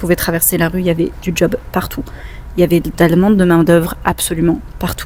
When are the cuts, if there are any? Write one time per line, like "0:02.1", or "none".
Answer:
none